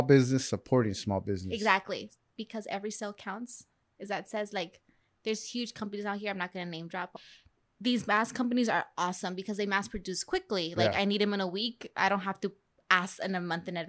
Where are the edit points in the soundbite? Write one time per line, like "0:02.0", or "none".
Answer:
0:02.1
0:07.1